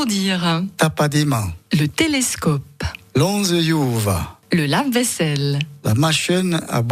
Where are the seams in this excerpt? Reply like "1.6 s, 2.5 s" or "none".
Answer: 1.5 s, 4.3 s